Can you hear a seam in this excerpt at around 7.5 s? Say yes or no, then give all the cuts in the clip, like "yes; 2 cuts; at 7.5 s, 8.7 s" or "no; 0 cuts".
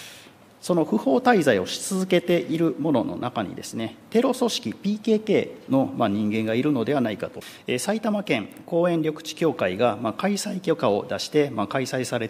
yes; 1 cut; at 7.5 s